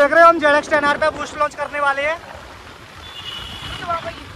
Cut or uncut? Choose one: uncut